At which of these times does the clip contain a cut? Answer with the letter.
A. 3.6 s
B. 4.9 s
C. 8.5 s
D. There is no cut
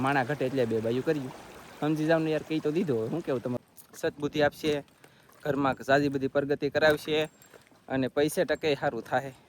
A